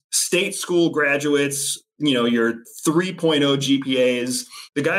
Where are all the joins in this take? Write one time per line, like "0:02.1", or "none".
0:02.6

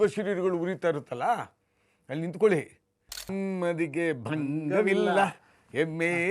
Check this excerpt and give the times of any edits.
0:03.3

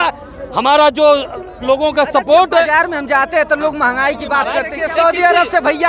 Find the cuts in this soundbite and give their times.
0:04.6

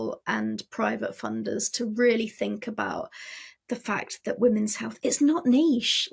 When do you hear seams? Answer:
none

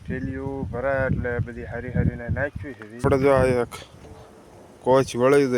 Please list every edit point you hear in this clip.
0:03.0

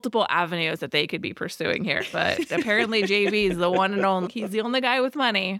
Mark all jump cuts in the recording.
0:04.3

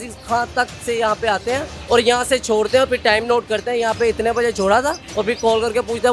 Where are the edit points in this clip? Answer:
0:01.7
0:05.0

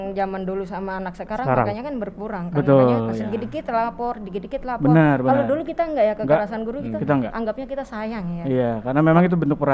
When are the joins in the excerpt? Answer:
none

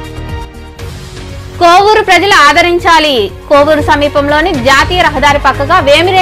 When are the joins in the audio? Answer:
0:01.6

